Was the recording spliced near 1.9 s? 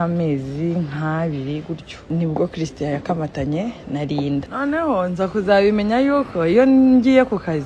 yes; 2 cuts; at 1.9 s, 4.5 s

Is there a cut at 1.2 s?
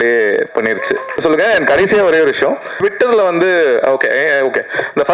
yes; 2 cuts; at 1.2 s, 2.7 s

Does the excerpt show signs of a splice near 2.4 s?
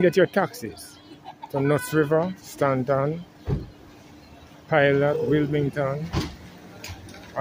yes; 1 cut; at 2.4 s

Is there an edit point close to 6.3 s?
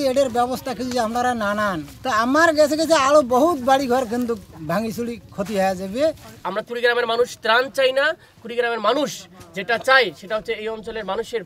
yes; 2 cuts; at 1.9 s, 6.3 s

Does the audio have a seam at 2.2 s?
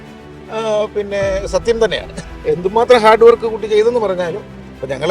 yes; 1 cut; at 2.2 s

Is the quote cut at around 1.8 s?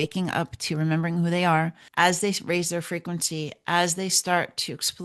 yes; 1 cut; at 1.8 s

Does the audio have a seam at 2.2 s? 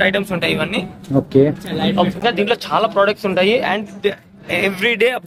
yes; 1 cut; at 2.2 s

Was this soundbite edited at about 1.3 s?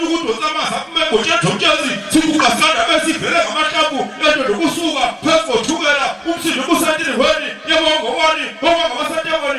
no; 0 cuts

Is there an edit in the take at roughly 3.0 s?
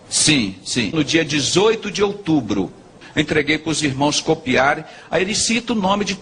yes; 1 cut; at 3.0 s

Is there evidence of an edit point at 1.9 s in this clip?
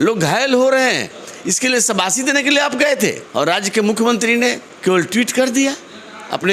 no; 2 cuts; at 3.2 s, 4.7 s

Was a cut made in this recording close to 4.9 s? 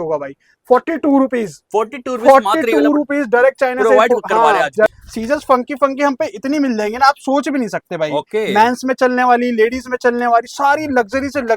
yes; 1 cut; at 4.9 s

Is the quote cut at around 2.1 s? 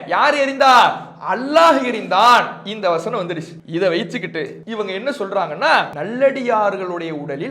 no; 3 cuts; at 3.5 s, 4.6 s, 6.0 s

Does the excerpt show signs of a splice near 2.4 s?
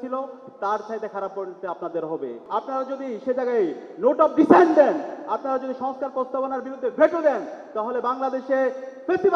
yes; 1 cut; at 2.4 s

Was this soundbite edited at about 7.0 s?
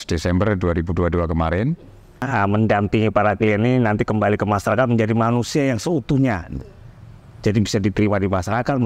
no; 1 cut; at 2.3 s

